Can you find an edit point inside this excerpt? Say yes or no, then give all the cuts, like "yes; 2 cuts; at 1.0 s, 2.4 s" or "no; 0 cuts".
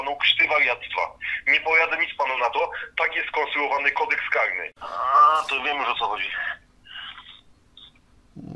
yes; 1 cut; at 4.6 s